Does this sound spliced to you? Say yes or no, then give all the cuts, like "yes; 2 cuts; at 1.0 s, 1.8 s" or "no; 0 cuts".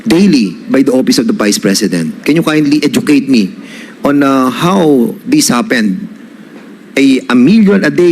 no; 0 cuts